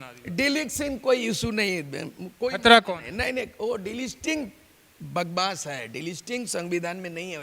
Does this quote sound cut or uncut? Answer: uncut